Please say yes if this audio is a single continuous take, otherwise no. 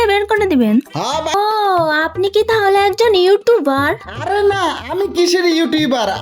no